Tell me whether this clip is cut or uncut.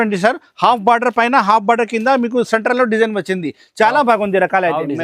uncut